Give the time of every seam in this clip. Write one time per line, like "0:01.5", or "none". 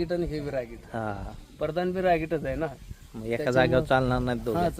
none